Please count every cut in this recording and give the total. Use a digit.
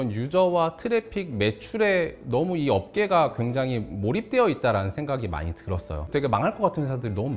1